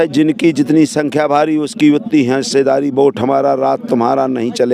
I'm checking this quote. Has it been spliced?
no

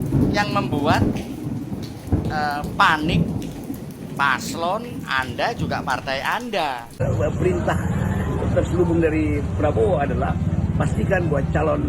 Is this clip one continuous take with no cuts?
no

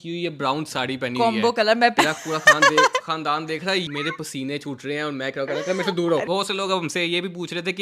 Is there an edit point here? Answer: yes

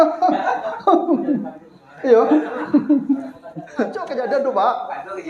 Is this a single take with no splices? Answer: no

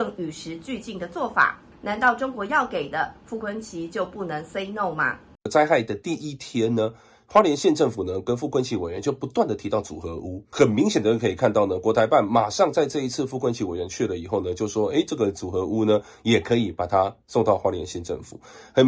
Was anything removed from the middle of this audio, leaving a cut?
yes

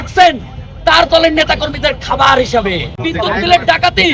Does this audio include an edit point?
yes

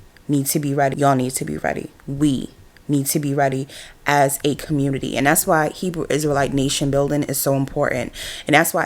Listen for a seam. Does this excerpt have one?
no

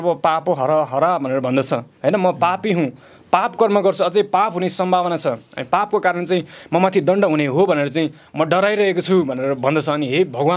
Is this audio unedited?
yes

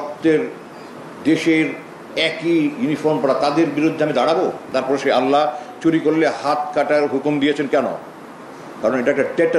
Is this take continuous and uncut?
no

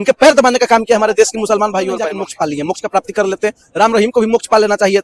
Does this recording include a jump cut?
yes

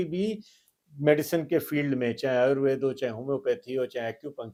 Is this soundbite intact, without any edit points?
yes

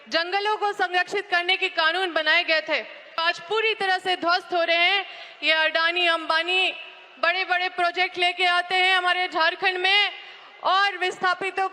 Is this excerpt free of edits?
no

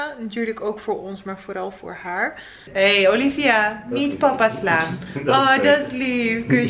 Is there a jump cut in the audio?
yes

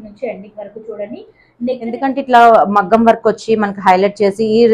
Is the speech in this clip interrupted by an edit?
yes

